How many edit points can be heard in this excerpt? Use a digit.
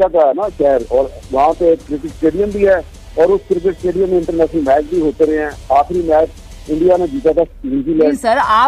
0